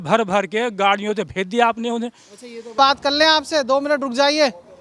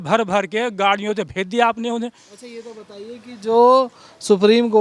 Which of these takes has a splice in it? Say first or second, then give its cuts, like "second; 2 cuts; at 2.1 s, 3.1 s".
first; 1 cut; at 2.8 s